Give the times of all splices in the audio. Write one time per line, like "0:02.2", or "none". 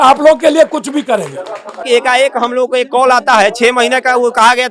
0:01.8